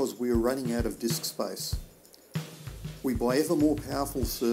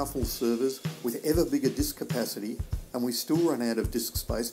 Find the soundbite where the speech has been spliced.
first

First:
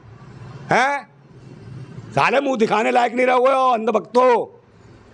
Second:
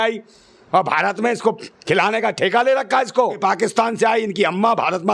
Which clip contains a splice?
second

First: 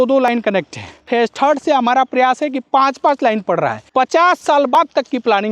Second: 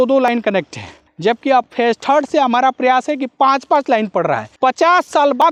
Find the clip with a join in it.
first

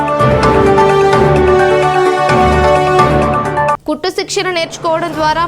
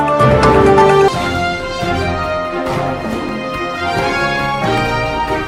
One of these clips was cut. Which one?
first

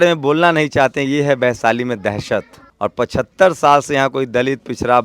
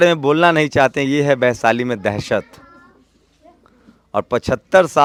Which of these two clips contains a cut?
first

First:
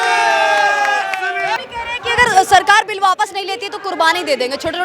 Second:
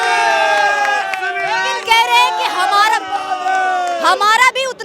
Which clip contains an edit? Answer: first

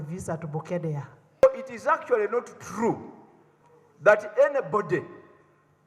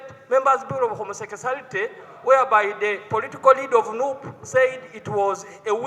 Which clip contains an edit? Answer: first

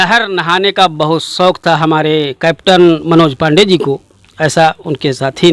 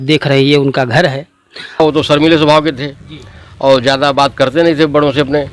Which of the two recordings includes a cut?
second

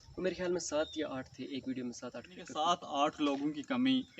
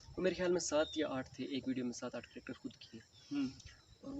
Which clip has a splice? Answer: first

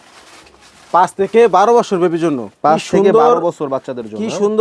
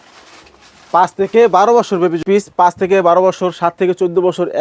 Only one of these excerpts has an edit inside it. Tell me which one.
second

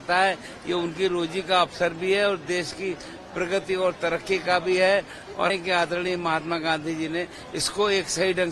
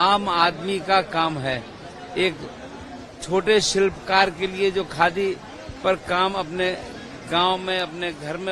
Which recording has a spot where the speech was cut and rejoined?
first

